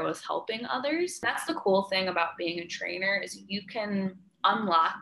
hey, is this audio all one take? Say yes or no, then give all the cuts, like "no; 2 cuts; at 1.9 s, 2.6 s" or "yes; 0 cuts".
no; 1 cut; at 1.3 s